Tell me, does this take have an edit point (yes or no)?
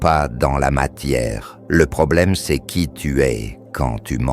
yes